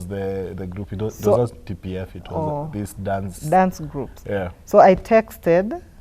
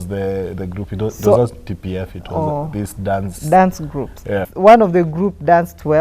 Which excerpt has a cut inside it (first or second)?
second